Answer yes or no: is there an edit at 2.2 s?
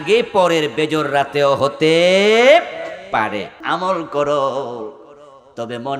no